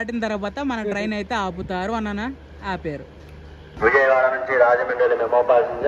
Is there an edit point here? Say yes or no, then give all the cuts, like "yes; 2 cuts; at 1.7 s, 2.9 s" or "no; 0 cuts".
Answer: yes; 1 cut; at 3.7 s